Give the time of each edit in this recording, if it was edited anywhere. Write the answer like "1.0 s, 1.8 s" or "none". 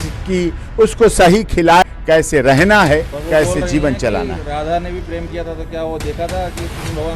1.8 s